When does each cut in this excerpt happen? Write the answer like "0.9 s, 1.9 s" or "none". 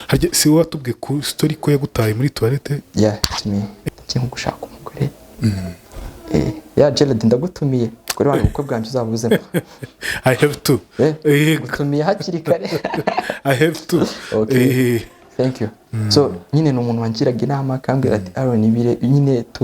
2.8 s, 3.8 s

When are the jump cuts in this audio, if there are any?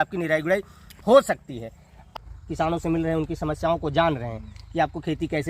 2.1 s

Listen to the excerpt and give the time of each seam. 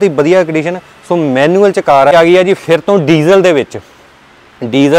2.1 s

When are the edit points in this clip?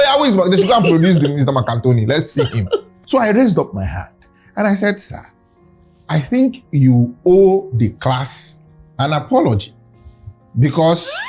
2.9 s

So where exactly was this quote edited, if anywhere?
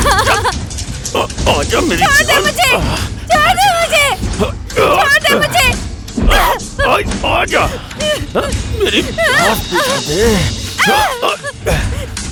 none

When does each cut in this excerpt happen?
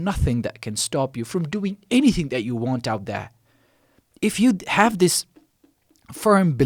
none

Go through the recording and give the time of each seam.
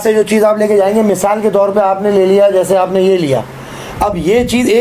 none

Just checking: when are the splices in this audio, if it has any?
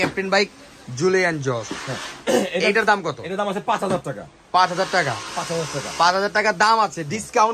none

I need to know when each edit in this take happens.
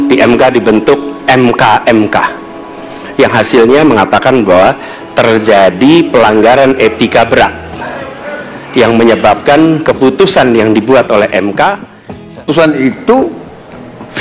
12.4 s

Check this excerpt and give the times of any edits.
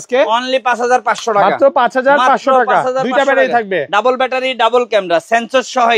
none

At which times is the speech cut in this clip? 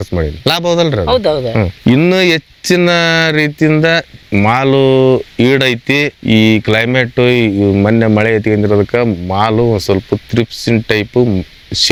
none

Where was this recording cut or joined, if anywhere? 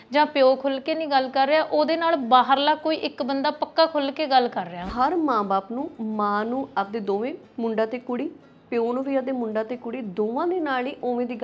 4.8 s

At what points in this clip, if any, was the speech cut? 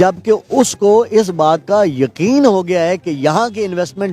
none

